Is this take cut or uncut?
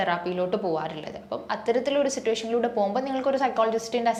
uncut